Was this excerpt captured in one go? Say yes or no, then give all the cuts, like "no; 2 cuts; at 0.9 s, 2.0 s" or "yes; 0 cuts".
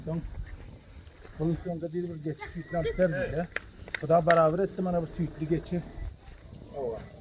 no; 1 cut; at 1.6 s